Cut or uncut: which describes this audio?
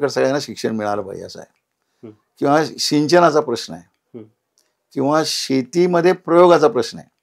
uncut